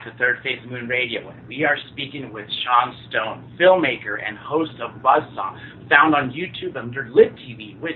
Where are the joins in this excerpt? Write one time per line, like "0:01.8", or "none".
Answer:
none

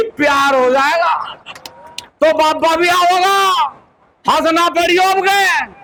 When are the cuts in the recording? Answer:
none

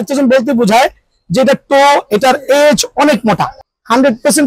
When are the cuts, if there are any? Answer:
0:03.5

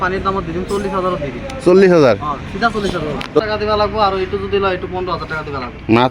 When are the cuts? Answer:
0:03.4

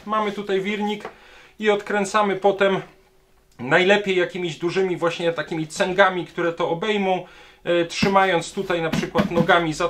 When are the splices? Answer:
none

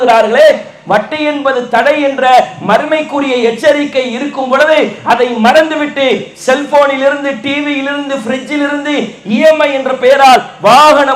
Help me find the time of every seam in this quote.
none

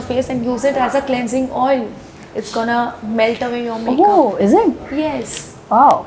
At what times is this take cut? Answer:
none

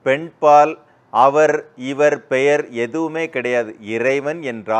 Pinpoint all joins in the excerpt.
none

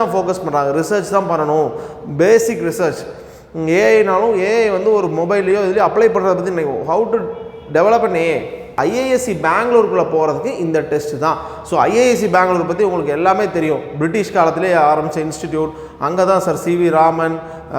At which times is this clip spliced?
0:08.7

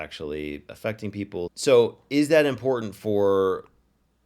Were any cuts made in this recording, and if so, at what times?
0:01.5

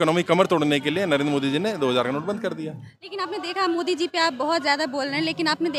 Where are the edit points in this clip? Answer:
none

